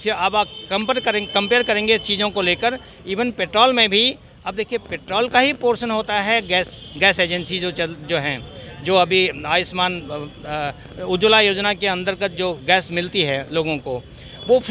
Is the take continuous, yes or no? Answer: yes